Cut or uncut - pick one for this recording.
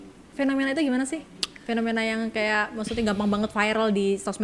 uncut